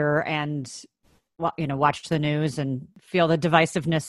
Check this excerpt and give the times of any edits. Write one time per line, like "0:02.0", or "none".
0:02.9